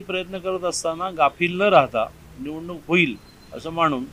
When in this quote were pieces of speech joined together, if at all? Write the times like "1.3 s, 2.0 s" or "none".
none

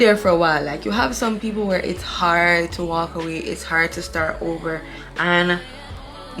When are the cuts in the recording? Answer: 5.0 s

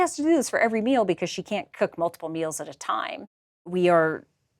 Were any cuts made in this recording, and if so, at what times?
3.6 s

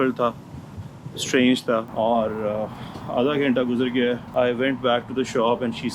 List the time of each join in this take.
1.9 s

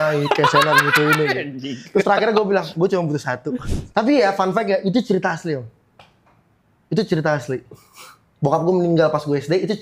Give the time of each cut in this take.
3.5 s

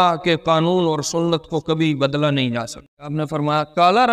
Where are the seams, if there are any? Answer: 3.2 s

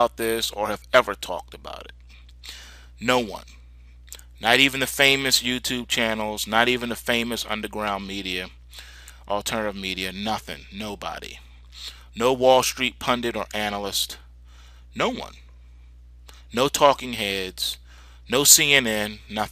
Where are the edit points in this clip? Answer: 9.5 s

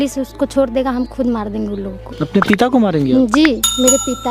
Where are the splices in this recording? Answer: 2.0 s

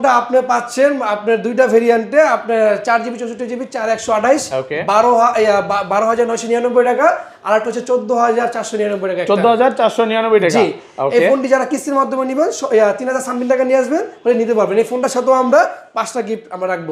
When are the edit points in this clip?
none

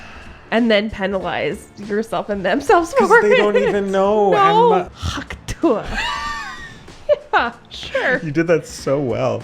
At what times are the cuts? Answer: 4.9 s

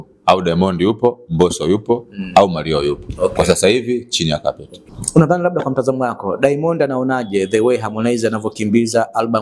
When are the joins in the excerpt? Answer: 4.9 s

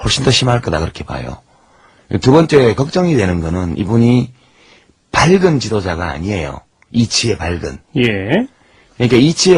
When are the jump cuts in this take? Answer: none

